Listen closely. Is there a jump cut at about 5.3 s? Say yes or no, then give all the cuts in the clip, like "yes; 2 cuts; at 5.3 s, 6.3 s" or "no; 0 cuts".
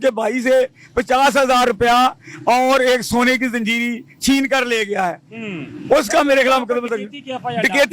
no; 0 cuts